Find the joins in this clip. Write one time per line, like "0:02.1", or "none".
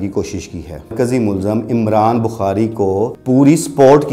0:00.9
0:03.2